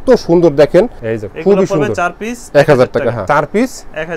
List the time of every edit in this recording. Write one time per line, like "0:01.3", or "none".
0:01.0
0:03.2